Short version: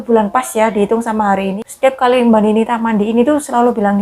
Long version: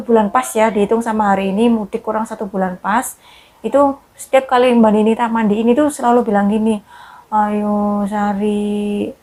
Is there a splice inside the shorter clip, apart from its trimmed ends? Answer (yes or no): yes